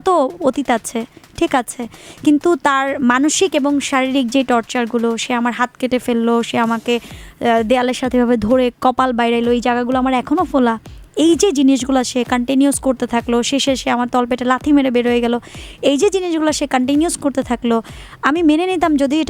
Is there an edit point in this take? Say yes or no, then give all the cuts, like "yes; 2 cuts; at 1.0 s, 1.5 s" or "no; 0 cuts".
no; 0 cuts